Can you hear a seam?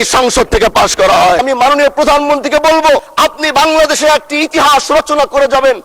yes; 2 cuts; at 1.4 s, 3.1 s

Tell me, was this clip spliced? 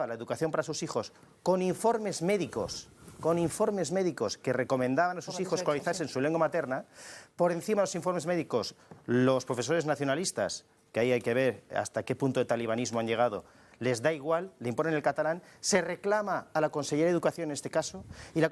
yes; 1 cut; at 15.5 s

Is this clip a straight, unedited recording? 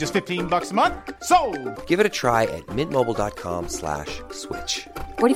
yes; 0 cuts

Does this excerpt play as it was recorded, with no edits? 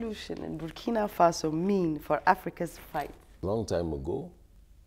no; 1 cut; at 3.2 s

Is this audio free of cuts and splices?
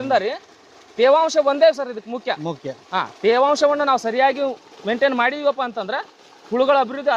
yes; 0 cuts

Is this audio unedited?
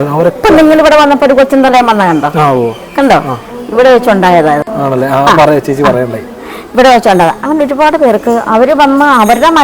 yes; 0 cuts

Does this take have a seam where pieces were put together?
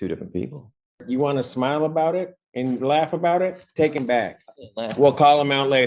yes; 1 cut; at 1.0 s

